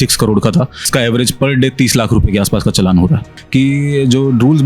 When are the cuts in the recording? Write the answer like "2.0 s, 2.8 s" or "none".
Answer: 0.9 s, 3.4 s